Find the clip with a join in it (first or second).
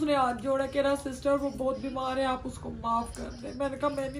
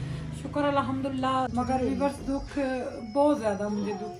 second